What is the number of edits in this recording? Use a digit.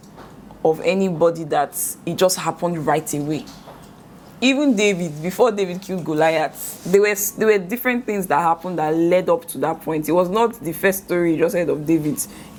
0